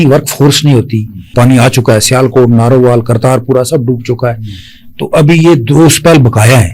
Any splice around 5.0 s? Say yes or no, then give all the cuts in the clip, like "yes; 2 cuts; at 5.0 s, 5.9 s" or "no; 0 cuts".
no; 1 cut; at 1.3 s